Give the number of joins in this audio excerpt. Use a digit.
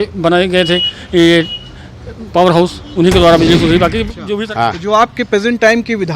1